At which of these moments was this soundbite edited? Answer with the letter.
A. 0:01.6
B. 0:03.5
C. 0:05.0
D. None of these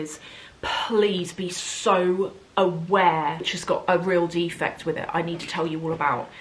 B